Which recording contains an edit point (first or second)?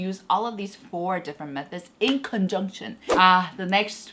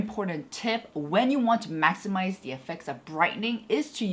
first